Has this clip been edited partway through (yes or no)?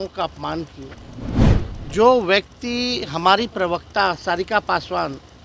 yes